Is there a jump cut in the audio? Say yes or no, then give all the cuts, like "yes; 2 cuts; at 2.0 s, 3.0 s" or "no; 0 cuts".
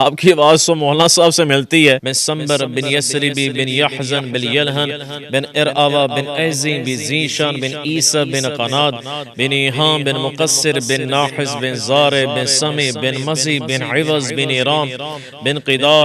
yes; 1 cut; at 2.1 s